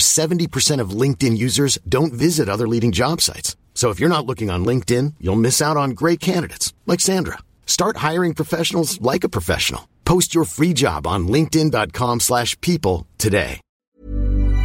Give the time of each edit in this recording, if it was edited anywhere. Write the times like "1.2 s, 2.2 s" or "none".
13.7 s